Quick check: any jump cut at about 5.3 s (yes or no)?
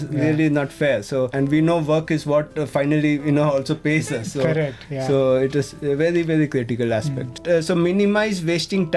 no